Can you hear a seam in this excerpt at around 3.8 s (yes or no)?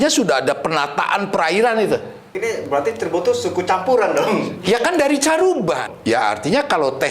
no